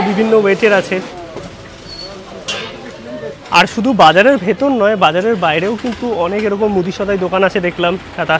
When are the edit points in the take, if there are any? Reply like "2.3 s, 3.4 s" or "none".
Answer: 1.2 s, 3.4 s